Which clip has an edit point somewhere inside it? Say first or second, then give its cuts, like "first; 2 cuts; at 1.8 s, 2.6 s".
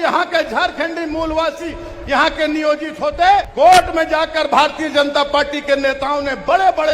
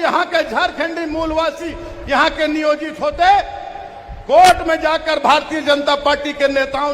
first; 1 cut; at 3.5 s